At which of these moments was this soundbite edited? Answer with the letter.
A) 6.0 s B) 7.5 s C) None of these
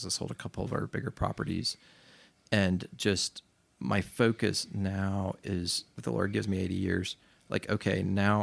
A